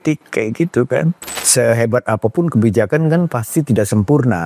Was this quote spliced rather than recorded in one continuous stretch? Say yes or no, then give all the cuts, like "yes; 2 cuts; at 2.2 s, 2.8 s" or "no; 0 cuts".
yes; 1 cut; at 1.3 s